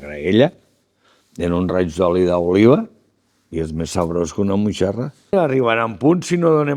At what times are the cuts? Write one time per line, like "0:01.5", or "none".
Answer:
0:05.3